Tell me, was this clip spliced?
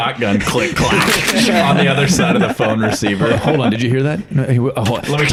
no; 0 cuts

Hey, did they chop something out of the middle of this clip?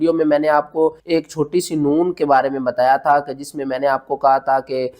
yes; 1 cut; at 1.0 s

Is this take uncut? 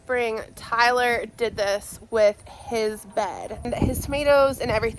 no; 1 cut; at 3.7 s

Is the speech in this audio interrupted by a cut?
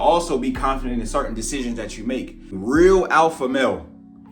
yes; 1 cut; at 2.5 s

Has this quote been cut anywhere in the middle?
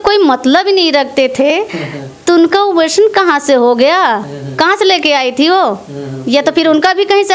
no; 0 cuts

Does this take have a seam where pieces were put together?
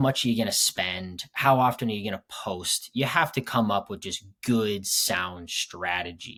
no; 0 cuts

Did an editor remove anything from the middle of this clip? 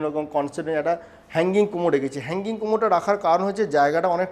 no; 0 cuts

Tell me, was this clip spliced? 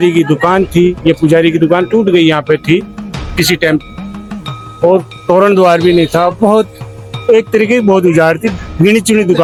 no; 0 cuts

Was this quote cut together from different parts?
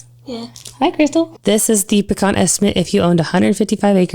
yes; 1 cut; at 1.4 s

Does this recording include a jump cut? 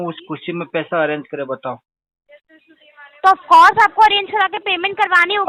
no; 0 cuts

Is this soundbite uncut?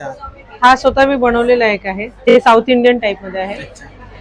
no; 1 cut; at 2.3 s

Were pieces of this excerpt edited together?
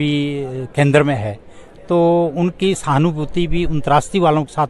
no; 0 cuts

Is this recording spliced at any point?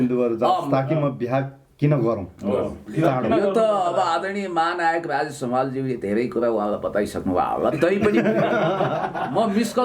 no; 0 cuts

